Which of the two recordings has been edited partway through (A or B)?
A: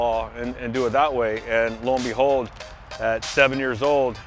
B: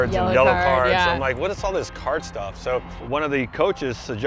B